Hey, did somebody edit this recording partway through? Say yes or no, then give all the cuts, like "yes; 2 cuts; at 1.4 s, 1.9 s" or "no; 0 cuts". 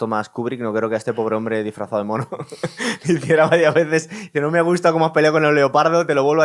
no; 0 cuts